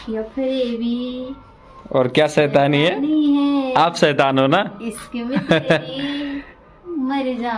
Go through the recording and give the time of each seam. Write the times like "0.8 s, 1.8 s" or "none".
none